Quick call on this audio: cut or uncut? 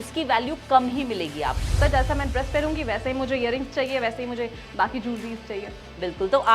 cut